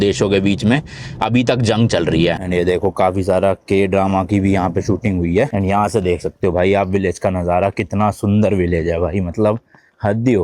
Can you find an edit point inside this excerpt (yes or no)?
yes